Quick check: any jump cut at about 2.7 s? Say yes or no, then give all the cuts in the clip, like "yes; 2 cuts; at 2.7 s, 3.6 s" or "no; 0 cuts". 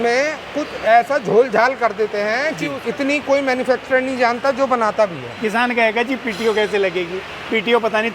yes; 2 cuts; at 2.7 s, 5.3 s